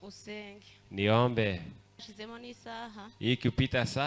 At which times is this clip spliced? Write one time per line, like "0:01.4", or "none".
0:02.1